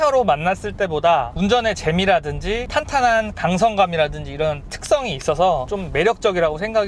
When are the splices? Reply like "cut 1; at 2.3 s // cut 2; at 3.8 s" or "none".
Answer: cut 1; at 2.6 s // cut 2; at 5.7 s